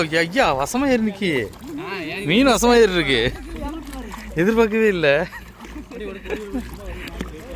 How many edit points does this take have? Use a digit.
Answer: 0